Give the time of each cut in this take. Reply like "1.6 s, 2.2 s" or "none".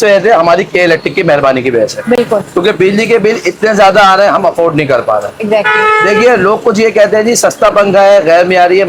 none

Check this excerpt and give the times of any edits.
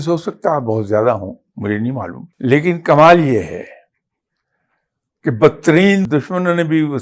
2.2 s, 6.1 s

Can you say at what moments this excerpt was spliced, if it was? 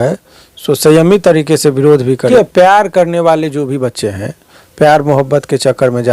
2.3 s

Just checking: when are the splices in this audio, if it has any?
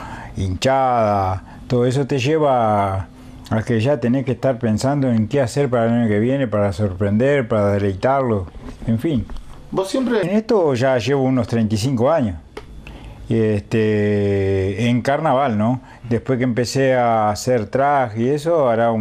10.2 s

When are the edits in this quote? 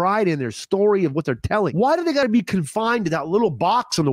2.2 s

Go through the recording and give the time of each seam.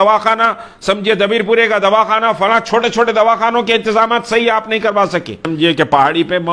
5.4 s

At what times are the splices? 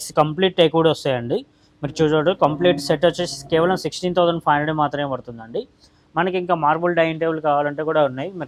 none

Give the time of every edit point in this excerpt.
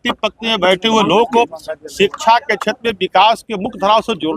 none

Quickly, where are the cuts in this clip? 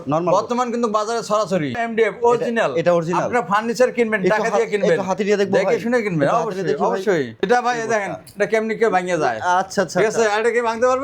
1.8 s, 7.4 s

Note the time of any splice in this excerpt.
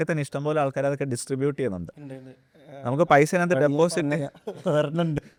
none

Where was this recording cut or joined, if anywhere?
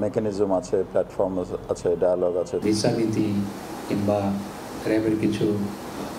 2.6 s

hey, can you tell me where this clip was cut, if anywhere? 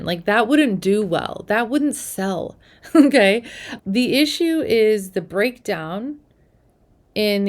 none

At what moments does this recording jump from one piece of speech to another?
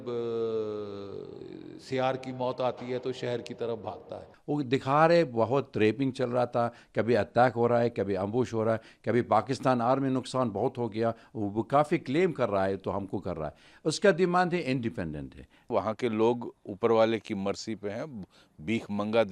4.3 s, 15.7 s

